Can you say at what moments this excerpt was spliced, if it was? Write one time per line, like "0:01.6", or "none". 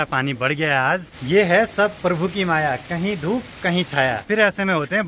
0:01.1
0:04.2